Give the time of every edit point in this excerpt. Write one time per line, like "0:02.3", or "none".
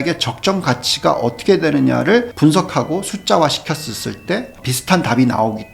0:02.3
0:04.7